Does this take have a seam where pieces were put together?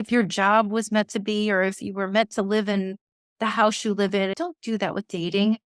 yes; 1 cut; at 4.3 s

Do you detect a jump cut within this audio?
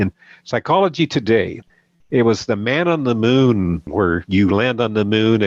yes; 1 cut; at 3.9 s

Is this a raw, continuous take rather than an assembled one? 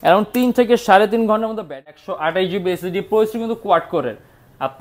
no; 1 cut; at 1.9 s

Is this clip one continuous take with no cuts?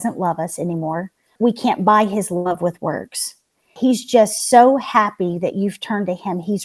no; 2 cuts; at 1.3 s, 3.6 s

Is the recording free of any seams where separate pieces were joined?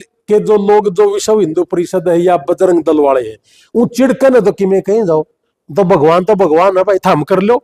yes; 0 cuts

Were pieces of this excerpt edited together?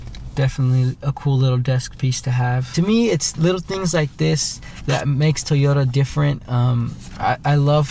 yes; 1 cut; at 2.7 s

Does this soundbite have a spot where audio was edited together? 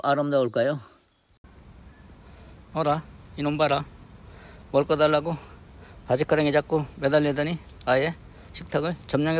yes; 1 cut; at 1.4 s

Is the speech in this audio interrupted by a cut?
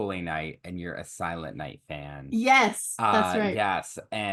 no; 0 cuts

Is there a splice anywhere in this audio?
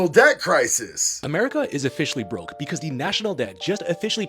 yes; 1 cut; at 1.2 s

